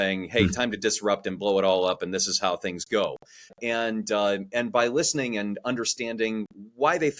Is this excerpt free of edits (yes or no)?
no